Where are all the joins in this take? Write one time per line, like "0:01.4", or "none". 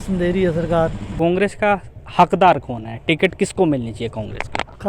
0:01.0